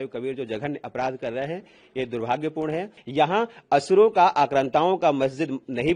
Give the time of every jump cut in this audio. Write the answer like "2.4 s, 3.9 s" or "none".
3.0 s